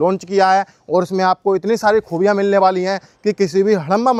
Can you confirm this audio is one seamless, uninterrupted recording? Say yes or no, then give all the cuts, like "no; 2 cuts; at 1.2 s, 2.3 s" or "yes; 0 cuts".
yes; 0 cuts